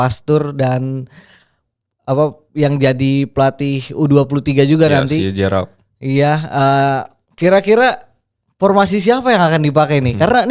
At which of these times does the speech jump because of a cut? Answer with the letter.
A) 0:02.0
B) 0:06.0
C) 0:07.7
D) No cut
D